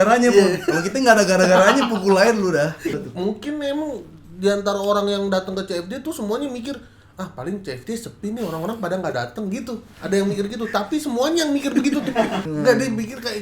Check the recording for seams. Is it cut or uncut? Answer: cut